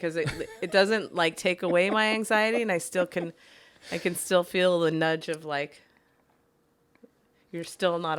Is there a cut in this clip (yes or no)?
no